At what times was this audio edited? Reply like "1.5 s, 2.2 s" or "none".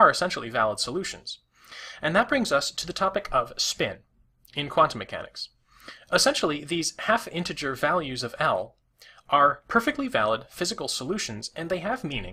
none